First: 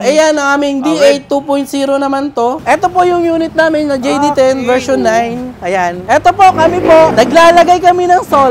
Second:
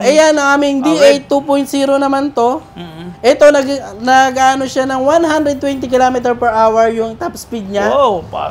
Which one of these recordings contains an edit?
first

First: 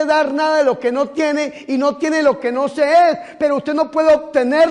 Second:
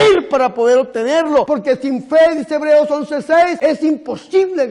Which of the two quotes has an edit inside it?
second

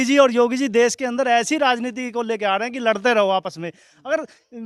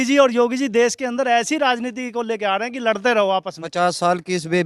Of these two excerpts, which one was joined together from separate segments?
second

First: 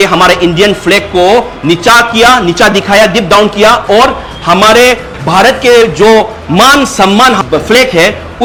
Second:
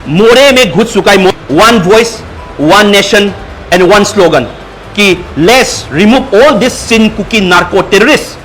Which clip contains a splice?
second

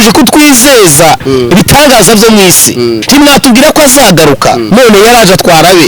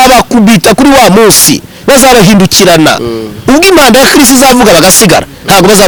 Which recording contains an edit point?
first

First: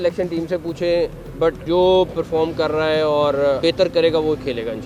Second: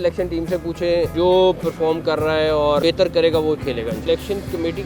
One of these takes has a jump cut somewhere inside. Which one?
second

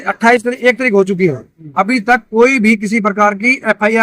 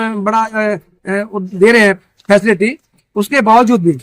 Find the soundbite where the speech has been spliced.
second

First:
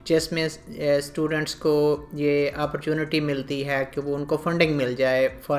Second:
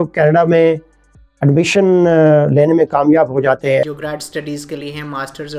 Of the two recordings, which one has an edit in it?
second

